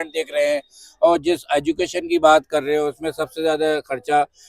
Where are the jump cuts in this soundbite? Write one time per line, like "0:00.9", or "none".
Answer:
none